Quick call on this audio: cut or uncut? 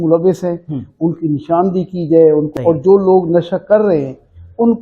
cut